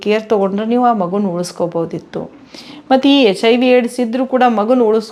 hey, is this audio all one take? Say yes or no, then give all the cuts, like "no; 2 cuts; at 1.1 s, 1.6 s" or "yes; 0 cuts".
yes; 0 cuts